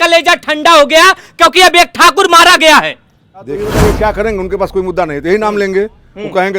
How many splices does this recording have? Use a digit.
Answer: 1